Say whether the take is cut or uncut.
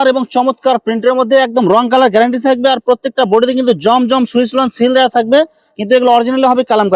uncut